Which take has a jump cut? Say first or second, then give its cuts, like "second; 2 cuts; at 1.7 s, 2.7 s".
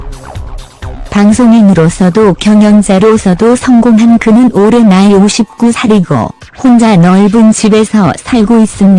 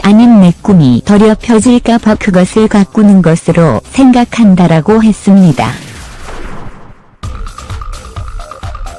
first; 1 cut; at 1.0 s